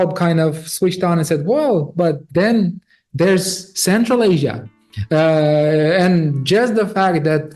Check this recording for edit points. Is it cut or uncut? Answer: uncut